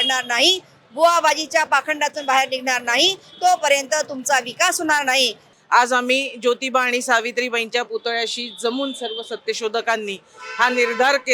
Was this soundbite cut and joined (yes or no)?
yes